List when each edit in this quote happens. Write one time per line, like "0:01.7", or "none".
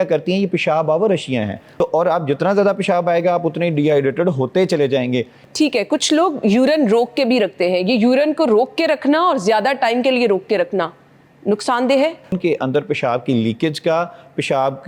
0:01.6
0:05.4
0:12.3